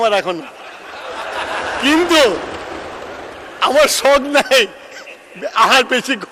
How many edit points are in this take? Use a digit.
0